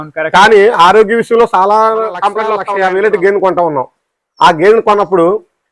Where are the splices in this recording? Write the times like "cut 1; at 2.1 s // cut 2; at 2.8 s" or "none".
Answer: cut 1; at 2.6 s